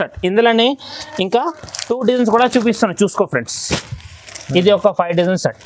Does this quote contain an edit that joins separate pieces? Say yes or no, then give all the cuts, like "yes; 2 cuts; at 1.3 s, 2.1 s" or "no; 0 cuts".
no; 0 cuts